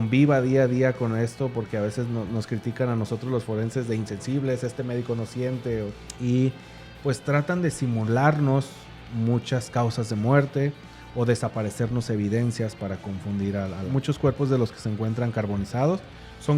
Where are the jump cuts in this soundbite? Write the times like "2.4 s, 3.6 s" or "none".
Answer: 6.0 s, 13.8 s